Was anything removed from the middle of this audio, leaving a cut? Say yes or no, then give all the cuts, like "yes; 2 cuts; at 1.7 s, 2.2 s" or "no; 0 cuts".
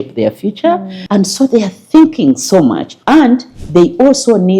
yes; 2 cuts; at 0.9 s, 2.9 s